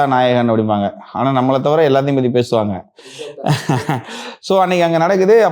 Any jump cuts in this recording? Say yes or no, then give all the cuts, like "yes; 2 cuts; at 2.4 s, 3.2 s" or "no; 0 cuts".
no; 0 cuts